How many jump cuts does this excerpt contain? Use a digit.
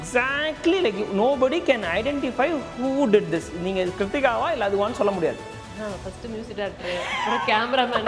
0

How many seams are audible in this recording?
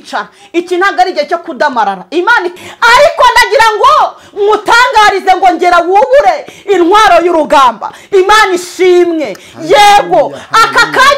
1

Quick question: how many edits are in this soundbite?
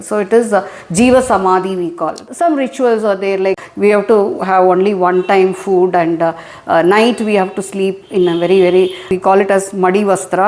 3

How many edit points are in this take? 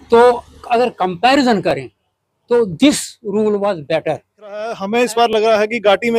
1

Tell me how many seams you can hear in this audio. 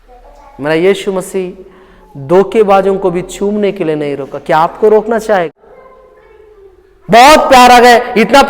1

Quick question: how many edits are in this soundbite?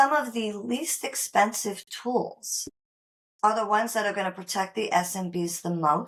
0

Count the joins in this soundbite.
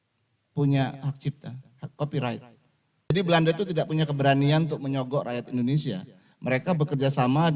1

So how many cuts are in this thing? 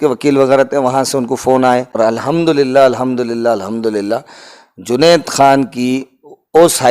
1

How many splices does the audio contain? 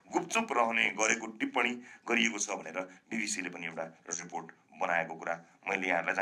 0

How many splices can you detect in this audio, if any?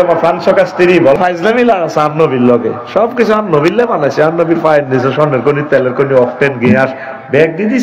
1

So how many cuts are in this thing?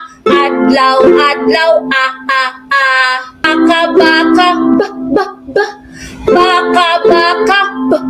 1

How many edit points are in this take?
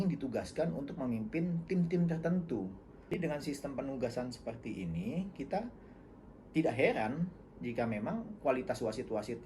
1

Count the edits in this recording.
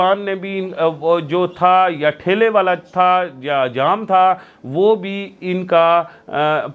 0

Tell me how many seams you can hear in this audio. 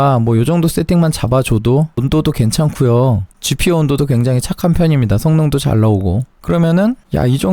2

